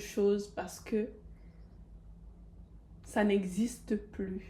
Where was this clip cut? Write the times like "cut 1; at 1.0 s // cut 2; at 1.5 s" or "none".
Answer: none